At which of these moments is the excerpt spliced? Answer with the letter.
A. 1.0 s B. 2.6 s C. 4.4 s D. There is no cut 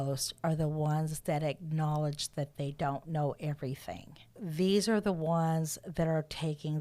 C